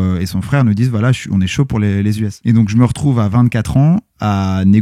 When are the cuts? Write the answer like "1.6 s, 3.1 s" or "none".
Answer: 2.4 s